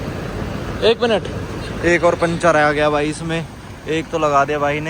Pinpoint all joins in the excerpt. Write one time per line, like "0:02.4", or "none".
none